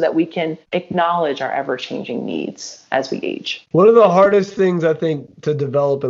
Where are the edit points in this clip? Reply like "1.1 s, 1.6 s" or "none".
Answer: none